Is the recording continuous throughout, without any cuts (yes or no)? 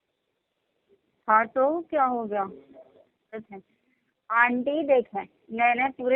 no